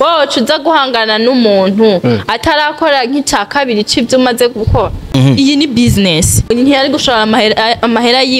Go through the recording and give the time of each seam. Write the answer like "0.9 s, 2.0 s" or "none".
5.1 s, 6.5 s